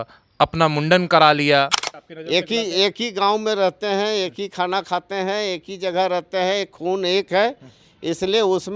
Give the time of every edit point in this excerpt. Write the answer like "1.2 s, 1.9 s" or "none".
1.8 s